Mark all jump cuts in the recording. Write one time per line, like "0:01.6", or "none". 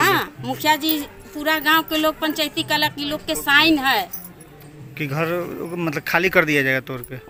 none